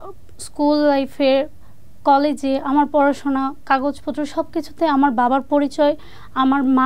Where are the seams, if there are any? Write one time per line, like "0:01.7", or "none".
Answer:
none

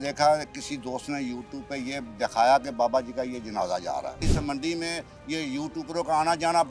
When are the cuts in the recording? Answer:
0:04.2

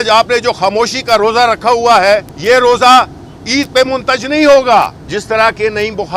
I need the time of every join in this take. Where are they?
0:02.3
0:05.0

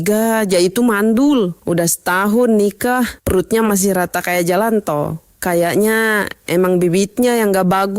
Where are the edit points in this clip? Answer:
0:01.6

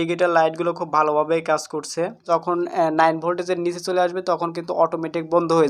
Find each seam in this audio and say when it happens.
0:02.2

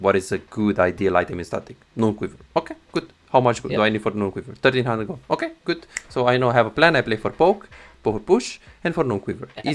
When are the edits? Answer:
none

